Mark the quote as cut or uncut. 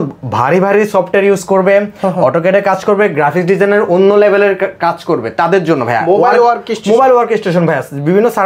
uncut